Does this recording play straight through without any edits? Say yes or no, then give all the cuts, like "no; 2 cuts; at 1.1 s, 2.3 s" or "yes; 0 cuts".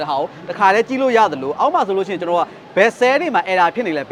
yes; 0 cuts